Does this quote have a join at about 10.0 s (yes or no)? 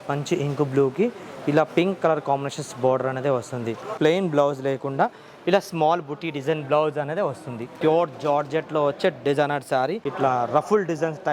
yes